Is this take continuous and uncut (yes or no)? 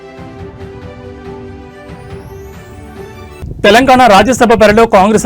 no